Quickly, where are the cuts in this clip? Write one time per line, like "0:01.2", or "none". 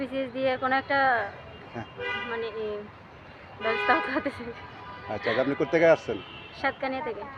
none